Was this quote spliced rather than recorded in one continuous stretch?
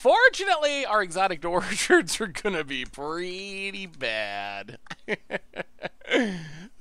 no; 0 cuts

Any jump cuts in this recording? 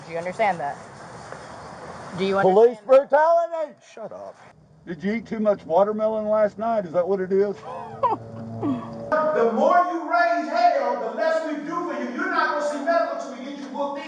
yes; 2 cuts; at 4.8 s, 9.1 s

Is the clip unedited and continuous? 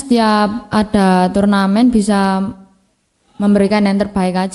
yes; 0 cuts

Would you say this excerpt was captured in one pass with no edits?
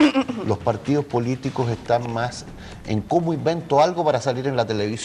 no; 1 cut; at 4.0 s

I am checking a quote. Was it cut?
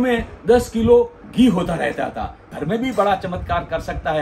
yes; 1 cut; at 2.5 s

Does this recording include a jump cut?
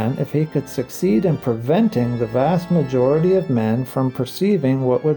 no; 0 cuts

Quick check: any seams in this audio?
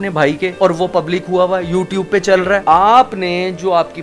yes; 1 cut; at 2.6 s

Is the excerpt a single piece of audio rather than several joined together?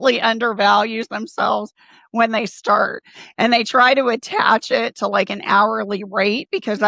yes; 0 cuts

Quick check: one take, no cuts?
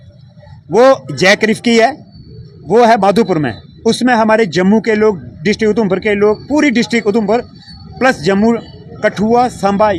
yes; 0 cuts

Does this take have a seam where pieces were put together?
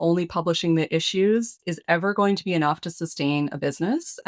no; 0 cuts

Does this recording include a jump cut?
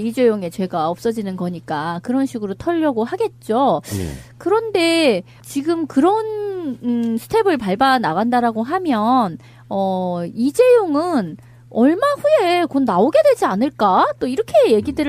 no; 0 cuts

